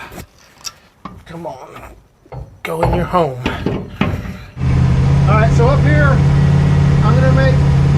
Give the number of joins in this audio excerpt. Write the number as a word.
one